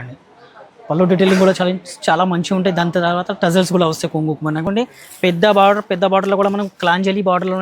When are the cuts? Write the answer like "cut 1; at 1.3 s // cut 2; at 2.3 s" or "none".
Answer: cut 1; at 4.7 s